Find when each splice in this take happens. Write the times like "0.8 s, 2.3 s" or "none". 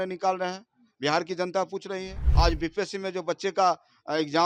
2.2 s